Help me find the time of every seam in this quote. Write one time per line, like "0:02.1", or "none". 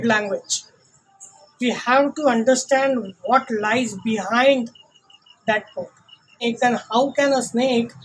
0:06.4